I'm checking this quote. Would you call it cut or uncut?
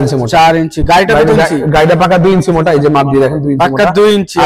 uncut